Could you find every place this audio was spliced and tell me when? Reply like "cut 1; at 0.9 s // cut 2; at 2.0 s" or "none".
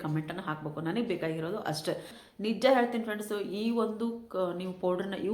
cut 1; at 2.1 s